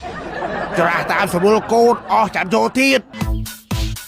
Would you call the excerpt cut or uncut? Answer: cut